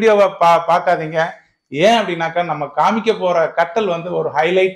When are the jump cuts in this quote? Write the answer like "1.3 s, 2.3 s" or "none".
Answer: none